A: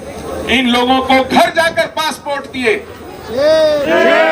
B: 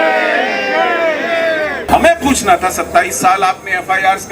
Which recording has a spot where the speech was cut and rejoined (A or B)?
B